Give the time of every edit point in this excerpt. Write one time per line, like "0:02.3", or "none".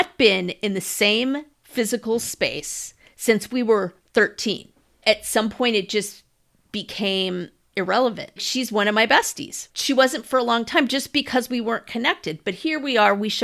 0:05.0
0:07.7
0:08.5
0:09.7